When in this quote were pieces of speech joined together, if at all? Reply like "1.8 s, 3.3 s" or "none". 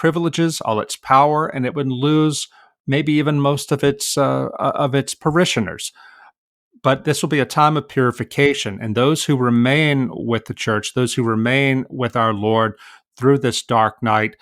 none